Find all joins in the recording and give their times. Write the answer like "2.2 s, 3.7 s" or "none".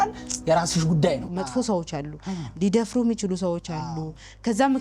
1.3 s